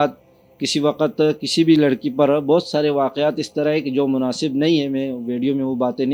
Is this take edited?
no; 0 cuts

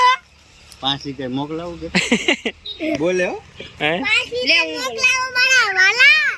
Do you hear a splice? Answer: no; 0 cuts

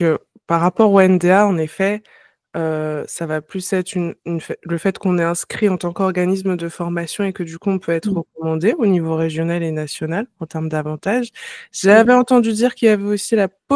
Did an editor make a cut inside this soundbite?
no; 0 cuts

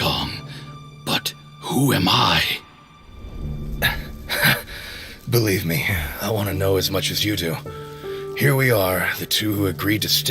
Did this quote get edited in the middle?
no; 0 cuts

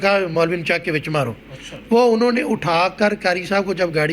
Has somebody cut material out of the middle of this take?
no; 0 cuts

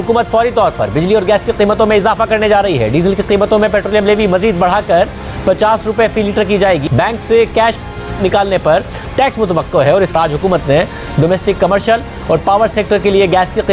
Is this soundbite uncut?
no; 2 cuts; at 6.9 s, 10.1 s

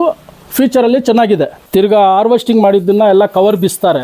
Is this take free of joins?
no; 1 cut; at 1.6 s

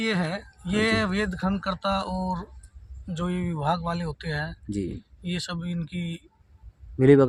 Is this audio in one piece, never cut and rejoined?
yes; 0 cuts

